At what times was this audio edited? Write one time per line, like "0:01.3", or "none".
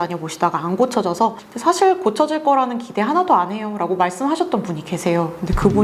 0:01.5

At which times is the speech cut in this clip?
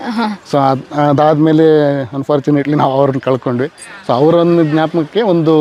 none

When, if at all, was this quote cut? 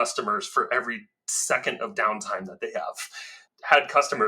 0:03.4

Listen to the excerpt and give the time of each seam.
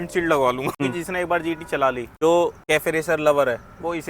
0:00.8
0:02.1
0:02.6

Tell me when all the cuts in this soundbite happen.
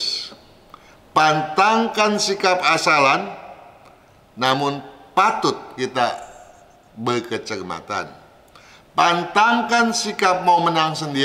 none

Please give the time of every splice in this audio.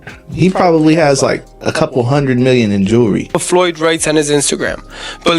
0:03.4

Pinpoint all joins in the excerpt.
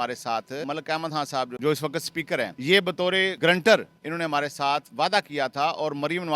0:01.1
0:02.5
0:03.3

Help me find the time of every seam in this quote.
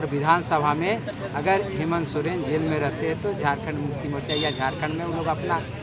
none

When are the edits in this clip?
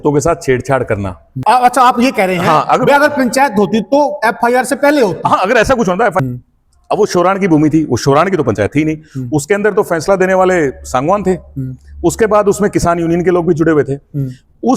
0:01.3
0:06.2

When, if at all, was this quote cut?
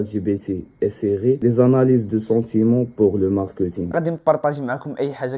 0:03.9

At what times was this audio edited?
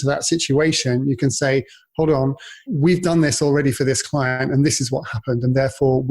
0:02.6

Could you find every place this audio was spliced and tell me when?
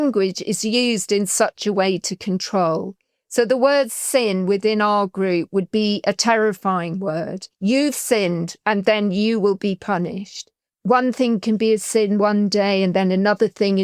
0:10.6

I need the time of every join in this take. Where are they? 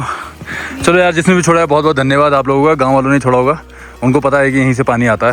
none

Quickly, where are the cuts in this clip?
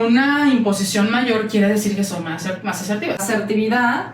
0:03.2

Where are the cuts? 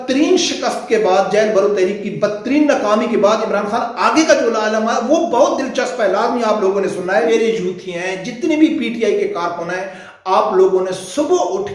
0:07.3

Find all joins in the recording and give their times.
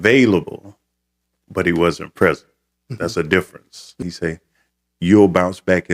0:04.1

